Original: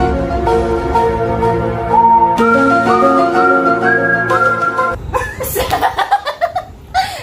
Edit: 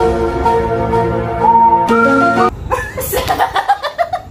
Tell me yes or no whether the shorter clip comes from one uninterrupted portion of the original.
no